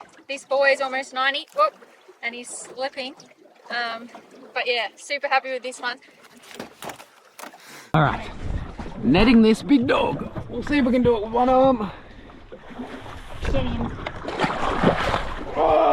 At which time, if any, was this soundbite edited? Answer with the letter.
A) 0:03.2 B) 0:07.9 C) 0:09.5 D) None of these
B